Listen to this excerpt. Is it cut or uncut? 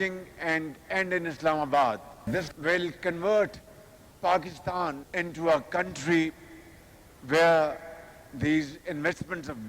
cut